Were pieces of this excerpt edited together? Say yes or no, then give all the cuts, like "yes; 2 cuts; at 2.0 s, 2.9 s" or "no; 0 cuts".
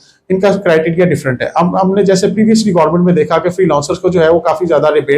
no; 0 cuts